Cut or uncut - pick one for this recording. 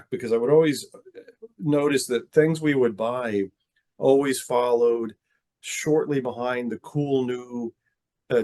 uncut